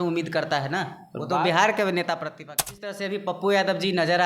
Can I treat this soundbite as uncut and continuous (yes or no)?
no